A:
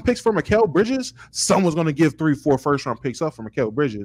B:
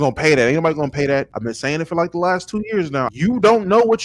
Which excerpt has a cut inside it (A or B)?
B